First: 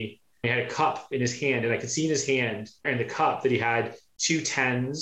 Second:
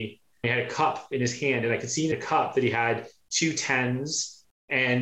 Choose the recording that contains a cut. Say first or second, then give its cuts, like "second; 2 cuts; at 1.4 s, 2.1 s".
second; 1 cut; at 2.1 s